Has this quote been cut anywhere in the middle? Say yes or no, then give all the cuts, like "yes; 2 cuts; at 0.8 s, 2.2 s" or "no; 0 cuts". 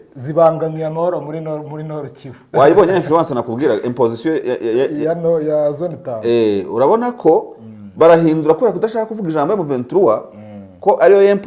no; 0 cuts